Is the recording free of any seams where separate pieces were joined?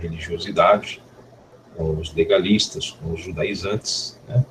yes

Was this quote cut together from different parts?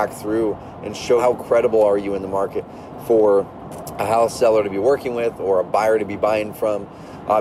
no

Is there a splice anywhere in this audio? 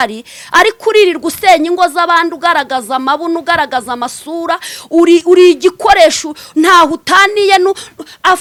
no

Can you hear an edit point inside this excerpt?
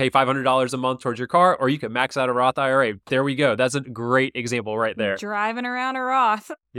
no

